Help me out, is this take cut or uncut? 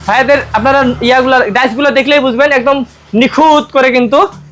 uncut